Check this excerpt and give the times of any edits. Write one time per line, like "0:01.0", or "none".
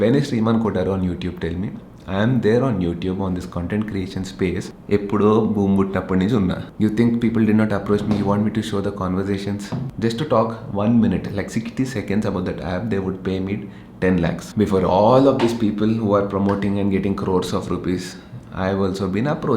0:04.7
0:06.6
0:09.8
0:14.4